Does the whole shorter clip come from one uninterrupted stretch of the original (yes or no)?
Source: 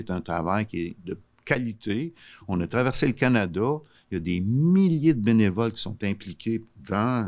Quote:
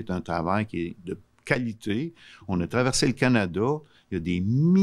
yes